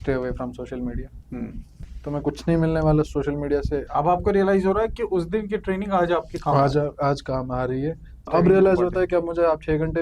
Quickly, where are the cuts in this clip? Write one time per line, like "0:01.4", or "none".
0:01.8
0:03.9
0:08.1

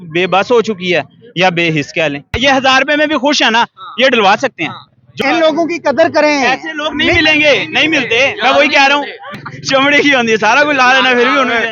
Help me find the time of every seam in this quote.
0:02.4
0:05.1
0:09.3

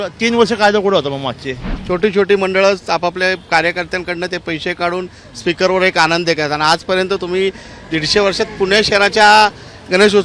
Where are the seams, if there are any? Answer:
0:01.7

